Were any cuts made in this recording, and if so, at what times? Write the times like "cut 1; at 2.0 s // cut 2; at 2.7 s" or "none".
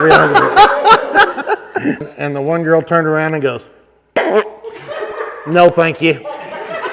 cut 1; at 2.0 s

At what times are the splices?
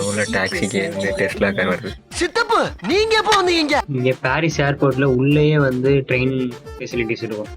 cut 1; at 3.9 s

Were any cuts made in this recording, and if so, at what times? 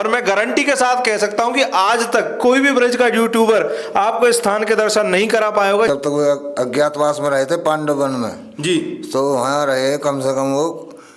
cut 1; at 5.9 s

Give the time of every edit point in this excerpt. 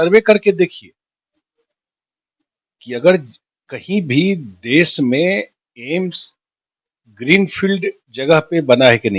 none

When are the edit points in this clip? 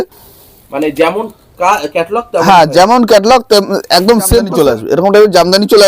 cut 1; at 4.5 s

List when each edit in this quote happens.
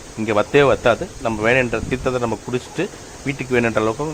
none

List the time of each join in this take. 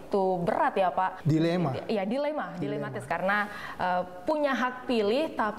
cut 1; at 1.2 s // cut 2; at 3.1 s

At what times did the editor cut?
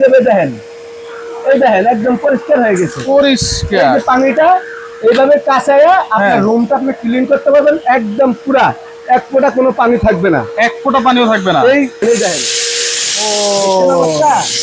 cut 1; at 12.0 s

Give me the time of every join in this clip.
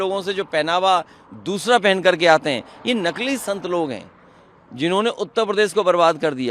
none

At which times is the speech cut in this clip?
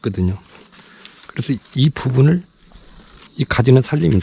none

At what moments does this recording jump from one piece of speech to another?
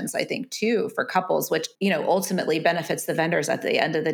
cut 1; at 1.7 s

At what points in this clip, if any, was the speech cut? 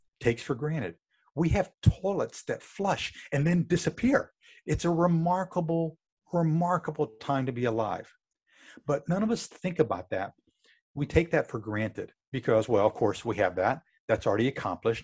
none

